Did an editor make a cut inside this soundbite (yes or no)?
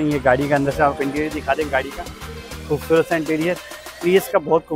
no